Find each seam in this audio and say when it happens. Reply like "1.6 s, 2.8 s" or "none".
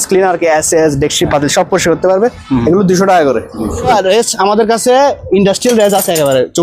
3.9 s